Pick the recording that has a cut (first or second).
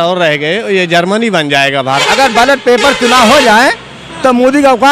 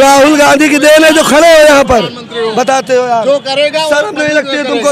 first